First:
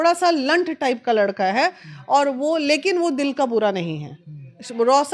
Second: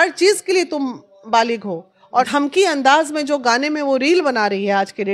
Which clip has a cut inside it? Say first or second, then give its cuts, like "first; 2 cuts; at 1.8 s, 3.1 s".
second; 1 cut; at 2.3 s